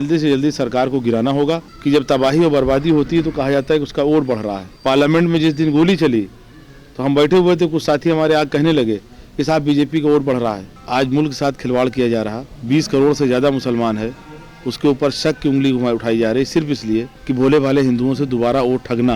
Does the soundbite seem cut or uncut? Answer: cut